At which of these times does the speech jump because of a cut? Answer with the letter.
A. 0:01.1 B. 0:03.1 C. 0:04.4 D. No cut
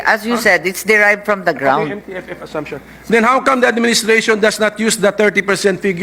D